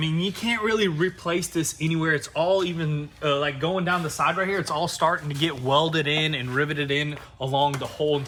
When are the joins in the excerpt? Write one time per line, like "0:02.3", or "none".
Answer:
none